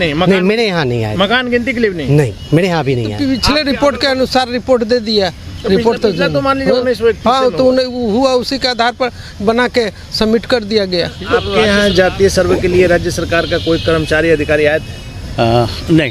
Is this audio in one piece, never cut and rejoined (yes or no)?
no